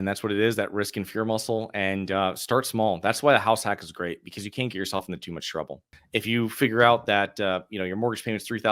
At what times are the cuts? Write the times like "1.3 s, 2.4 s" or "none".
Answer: 5.8 s